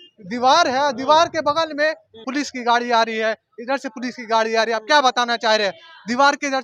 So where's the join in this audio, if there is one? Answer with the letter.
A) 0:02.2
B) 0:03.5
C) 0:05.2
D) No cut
A